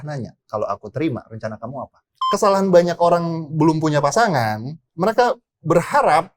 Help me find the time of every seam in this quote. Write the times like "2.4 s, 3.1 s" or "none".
2.0 s